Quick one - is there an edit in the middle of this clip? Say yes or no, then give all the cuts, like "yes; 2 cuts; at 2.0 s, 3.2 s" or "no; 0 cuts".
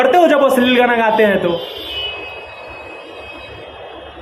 no; 0 cuts